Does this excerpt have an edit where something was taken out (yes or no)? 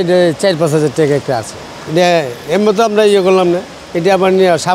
no